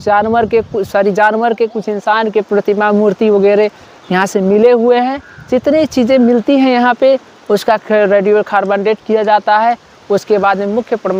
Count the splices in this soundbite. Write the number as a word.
zero